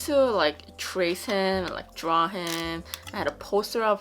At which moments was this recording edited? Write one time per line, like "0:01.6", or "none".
none